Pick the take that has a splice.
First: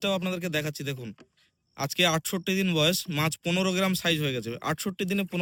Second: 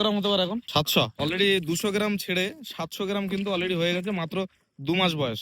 second; 1 cut; at 1.0 s

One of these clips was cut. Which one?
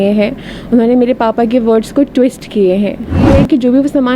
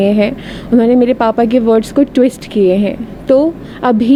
first; 1 cut; at 3.2 s

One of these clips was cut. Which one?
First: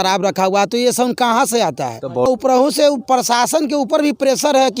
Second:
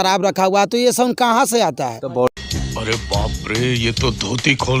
first; 1 cut; at 2.3 s

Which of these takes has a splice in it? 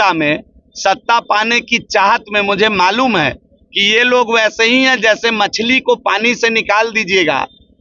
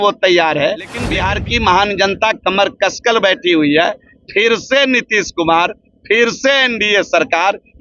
second; 1 cut; at 1.0 s

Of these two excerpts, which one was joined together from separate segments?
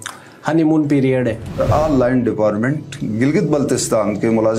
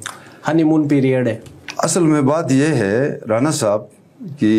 first; 1 cut; at 1.6 s

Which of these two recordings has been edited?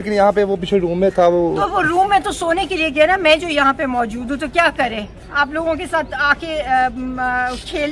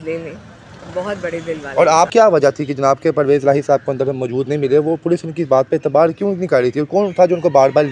second; 1 cut; at 2.1 s

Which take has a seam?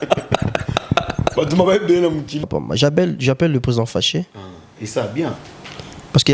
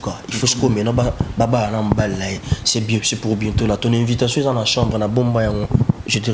first; 1 cut; at 2.4 s

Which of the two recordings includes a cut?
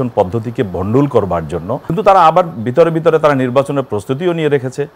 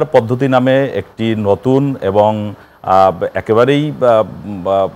first; 1 cut; at 1.8 s

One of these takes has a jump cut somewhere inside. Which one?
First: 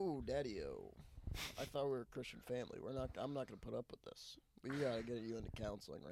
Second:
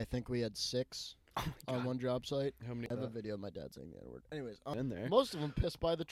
second; 2 cuts; at 2.9 s, 4.7 s

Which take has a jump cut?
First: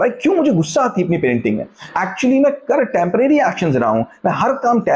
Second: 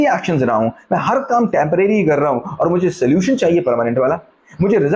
first; 1 cut; at 1.8 s

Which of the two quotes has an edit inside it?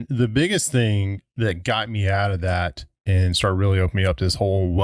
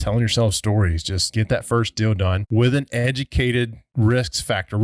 second; 3 cuts; at 1.2 s, 2.4 s, 3.8 s

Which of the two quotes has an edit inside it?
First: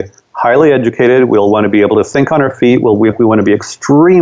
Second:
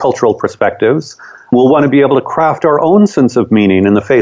second; 1 cut; at 1.5 s

